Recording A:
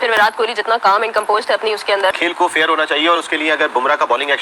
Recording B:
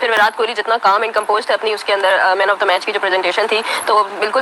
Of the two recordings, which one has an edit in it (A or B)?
A